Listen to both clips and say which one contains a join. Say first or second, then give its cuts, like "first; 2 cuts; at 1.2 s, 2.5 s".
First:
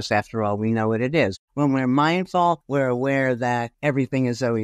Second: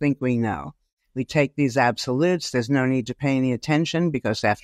first; 3 cuts; at 1.3 s, 2.6 s, 3.7 s